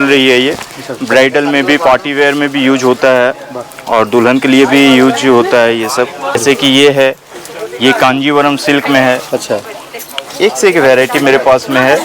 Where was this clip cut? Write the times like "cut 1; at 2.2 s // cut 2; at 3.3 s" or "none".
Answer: cut 1; at 6.4 s

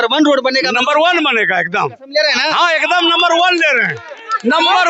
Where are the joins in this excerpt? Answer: none

